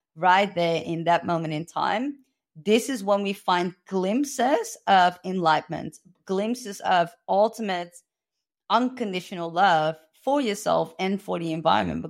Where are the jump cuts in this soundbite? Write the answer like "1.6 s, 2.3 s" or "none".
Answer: none